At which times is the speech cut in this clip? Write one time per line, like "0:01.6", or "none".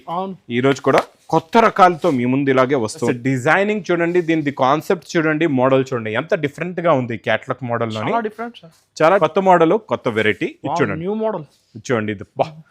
0:03.0
0:09.2